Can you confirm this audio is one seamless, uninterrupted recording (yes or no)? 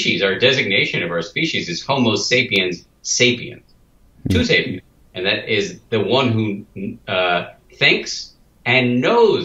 yes